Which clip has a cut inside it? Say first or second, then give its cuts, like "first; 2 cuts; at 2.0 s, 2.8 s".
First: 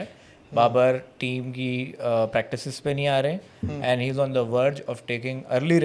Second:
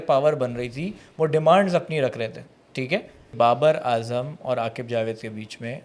second; 1 cut; at 3.3 s